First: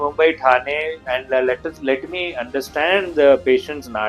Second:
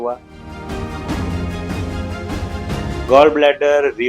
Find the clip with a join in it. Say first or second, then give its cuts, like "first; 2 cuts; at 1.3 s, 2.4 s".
second; 1 cut; at 3.0 s